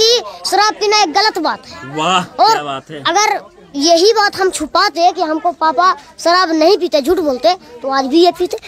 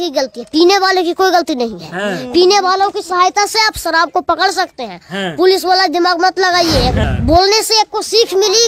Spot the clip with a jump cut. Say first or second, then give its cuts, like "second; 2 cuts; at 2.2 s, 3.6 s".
second; 1 cut; at 7.0 s